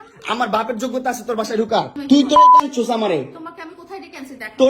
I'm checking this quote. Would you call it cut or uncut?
cut